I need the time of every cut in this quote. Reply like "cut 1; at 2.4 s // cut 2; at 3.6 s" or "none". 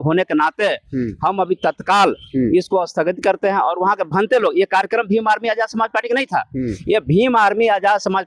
none